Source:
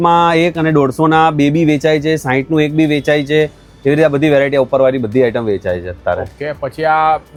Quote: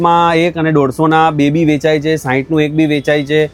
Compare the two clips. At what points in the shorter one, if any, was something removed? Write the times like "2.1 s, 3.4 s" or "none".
none